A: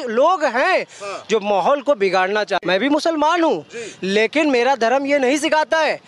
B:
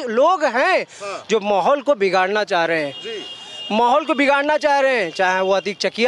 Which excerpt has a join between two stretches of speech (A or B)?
A